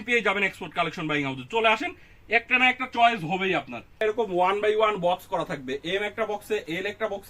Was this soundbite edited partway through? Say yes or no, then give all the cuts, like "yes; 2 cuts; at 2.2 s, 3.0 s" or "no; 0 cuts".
yes; 1 cut; at 3.9 s